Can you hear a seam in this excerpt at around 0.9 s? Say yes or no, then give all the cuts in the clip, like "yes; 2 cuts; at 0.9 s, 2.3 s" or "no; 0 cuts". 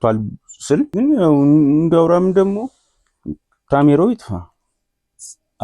yes; 1 cut; at 0.9 s